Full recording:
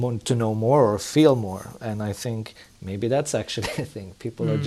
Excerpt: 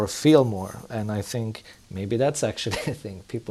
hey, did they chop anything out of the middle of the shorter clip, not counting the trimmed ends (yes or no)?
no